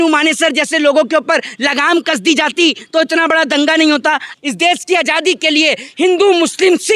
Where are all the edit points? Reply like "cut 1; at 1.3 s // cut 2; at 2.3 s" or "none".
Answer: cut 1; at 4.3 s